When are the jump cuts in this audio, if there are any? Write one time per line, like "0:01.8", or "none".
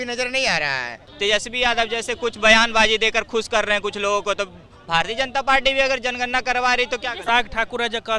0:01.0
0:07.2